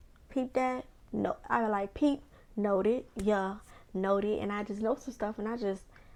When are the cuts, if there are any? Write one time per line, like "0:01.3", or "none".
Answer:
none